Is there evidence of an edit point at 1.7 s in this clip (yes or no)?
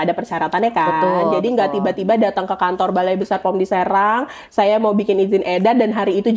no